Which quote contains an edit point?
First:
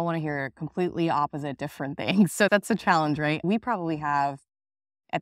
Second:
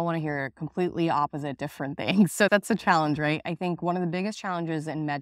first; 1 cut; at 3.4 s

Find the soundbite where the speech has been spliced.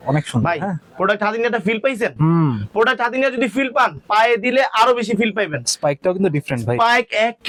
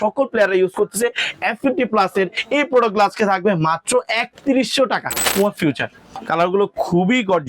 second; 1 cut; at 5.6 s

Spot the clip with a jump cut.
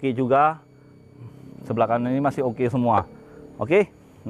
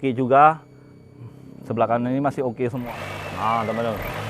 second; 1 cut; at 2.8 s

